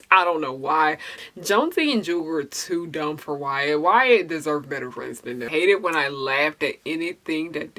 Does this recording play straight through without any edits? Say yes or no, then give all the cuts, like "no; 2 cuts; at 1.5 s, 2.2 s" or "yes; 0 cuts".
no; 2 cuts; at 1.1 s, 5.4 s